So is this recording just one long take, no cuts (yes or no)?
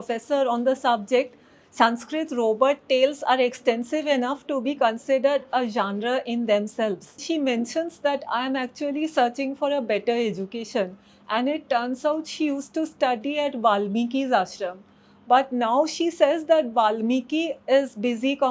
no